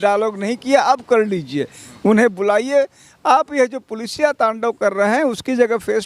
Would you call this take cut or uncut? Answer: uncut